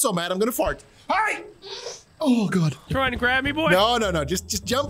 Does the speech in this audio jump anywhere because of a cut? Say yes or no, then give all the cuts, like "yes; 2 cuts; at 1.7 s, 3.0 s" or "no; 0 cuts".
yes; 1 cut; at 2.8 s